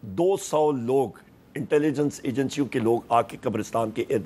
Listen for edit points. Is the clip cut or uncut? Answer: uncut